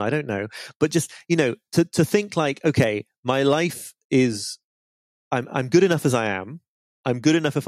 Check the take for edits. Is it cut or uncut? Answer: uncut